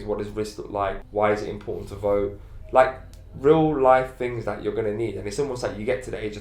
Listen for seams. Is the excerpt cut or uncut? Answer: cut